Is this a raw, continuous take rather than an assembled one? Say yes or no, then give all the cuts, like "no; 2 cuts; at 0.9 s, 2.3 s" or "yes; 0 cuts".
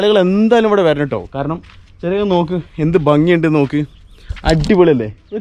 yes; 0 cuts